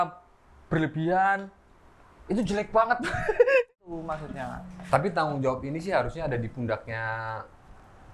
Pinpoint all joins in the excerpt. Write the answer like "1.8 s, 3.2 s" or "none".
3.7 s